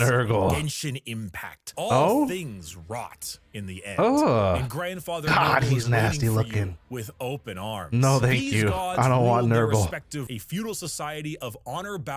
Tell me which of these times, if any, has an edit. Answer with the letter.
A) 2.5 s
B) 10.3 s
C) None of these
B